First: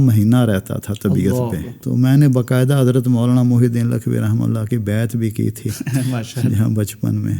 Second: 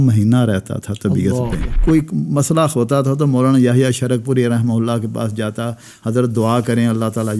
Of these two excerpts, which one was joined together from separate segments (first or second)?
second